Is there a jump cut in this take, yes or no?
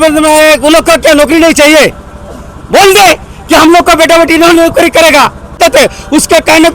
yes